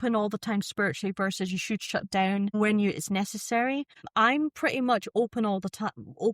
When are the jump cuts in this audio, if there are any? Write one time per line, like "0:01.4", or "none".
0:02.6
0:04.1